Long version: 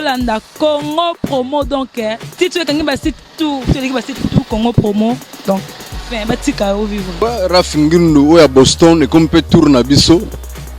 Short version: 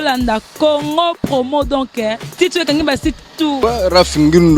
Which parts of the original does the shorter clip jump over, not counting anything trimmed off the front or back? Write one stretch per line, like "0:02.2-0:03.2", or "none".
0:03.6-0:07.2